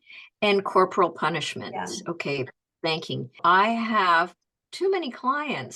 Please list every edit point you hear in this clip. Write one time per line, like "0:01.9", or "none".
0:03.4